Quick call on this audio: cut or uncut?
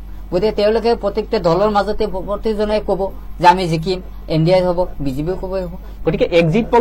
uncut